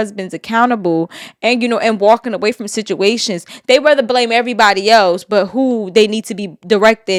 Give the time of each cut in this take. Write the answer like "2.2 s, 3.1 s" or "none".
none

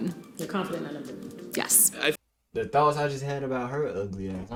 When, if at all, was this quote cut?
none

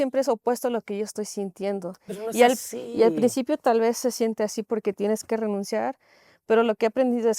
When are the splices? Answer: none

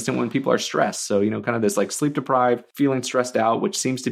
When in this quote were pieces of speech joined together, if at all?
2.7 s

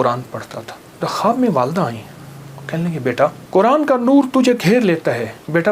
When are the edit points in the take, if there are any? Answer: 1.3 s, 3.4 s

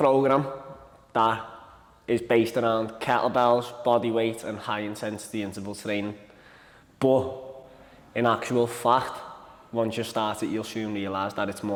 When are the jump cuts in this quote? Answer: none

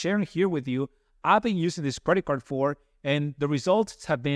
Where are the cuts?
none

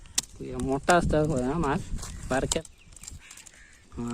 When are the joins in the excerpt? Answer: 2.6 s

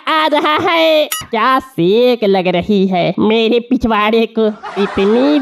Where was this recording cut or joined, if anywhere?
1.2 s

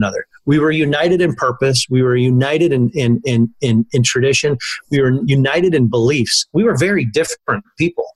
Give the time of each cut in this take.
none

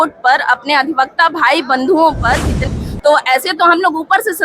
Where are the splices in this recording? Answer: 2.7 s

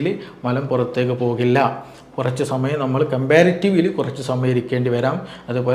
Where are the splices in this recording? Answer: none

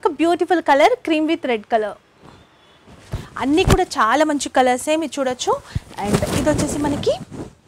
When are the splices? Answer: none

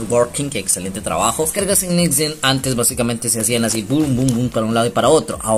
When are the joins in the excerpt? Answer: 1.5 s

